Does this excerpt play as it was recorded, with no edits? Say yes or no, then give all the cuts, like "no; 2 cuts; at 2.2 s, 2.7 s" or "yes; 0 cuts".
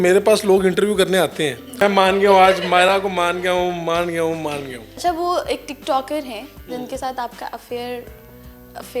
no; 2 cuts; at 1.8 s, 5.0 s